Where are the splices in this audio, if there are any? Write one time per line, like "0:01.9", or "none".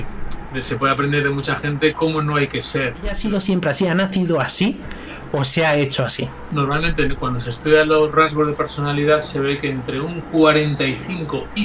0:03.2
0:06.4